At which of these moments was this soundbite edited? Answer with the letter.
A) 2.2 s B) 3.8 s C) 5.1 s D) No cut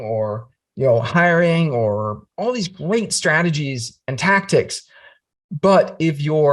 A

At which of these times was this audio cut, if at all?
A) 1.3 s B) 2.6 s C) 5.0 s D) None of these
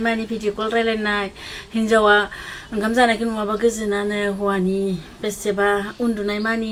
D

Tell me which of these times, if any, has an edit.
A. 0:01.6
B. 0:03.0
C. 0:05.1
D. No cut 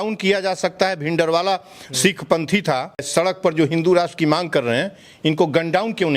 B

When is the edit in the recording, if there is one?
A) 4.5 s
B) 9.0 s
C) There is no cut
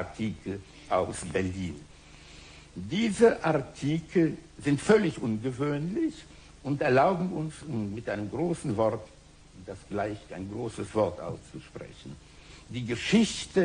C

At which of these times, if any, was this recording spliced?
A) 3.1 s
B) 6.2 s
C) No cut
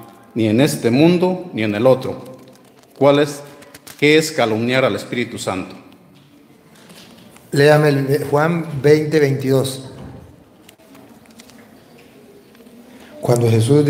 C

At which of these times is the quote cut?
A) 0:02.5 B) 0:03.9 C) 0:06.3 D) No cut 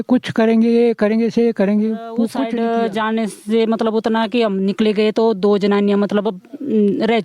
A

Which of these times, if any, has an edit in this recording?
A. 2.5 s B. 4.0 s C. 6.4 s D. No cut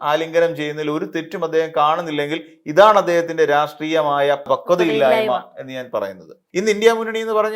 C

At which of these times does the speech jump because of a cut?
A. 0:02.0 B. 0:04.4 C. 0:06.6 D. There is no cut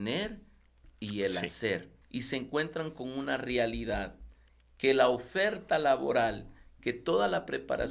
A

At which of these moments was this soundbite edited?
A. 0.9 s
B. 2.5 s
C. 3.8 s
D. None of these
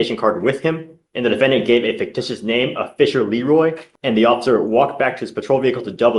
C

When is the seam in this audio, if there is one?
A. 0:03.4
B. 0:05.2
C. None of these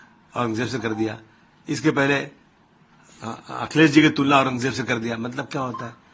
C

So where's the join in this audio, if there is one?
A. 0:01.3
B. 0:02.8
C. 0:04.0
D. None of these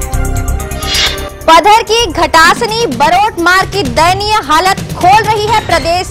A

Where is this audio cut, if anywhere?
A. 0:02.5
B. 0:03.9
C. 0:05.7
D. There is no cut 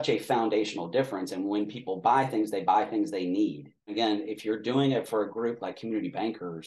B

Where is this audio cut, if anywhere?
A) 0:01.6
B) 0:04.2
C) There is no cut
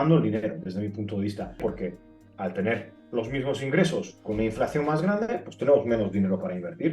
A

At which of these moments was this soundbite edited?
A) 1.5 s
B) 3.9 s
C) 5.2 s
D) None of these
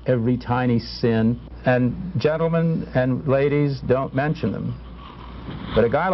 A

